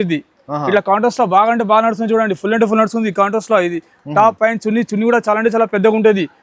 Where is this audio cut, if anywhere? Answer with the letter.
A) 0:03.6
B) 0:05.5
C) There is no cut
C